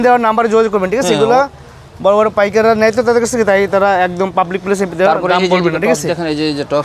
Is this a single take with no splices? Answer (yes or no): yes